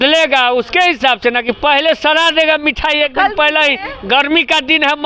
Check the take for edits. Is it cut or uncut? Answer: uncut